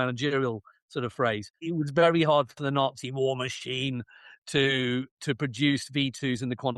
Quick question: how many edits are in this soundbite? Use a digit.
1